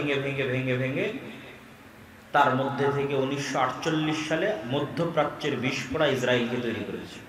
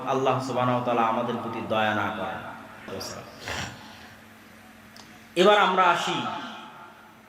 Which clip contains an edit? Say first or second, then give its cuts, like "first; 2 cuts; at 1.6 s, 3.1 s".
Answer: second; 1 cut; at 2.9 s